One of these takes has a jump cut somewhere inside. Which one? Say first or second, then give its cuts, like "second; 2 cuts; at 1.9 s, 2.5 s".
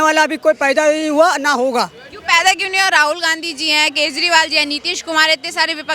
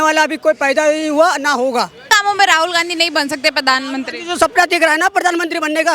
second; 1 cut; at 2.0 s